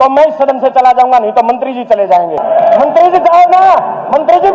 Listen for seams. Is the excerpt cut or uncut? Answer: cut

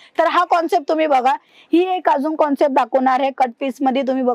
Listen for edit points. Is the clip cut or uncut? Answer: cut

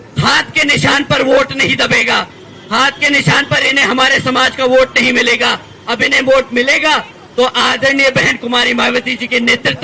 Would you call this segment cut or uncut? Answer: uncut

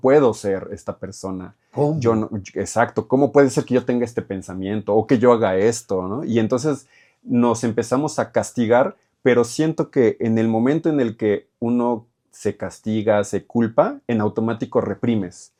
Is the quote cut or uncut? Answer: uncut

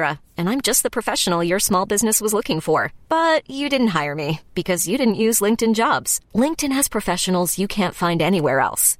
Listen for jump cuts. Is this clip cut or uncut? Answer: uncut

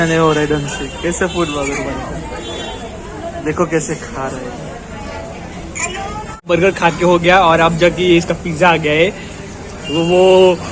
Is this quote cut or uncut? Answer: uncut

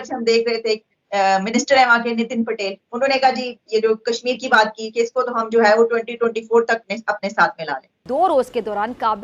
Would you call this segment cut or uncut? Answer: cut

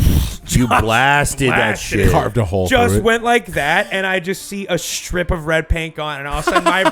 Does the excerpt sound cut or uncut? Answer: uncut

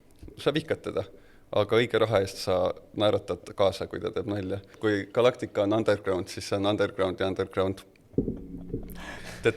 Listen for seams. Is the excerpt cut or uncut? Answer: cut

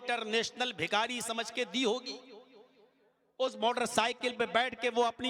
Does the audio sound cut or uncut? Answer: uncut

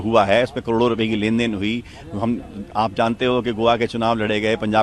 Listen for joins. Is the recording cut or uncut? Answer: uncut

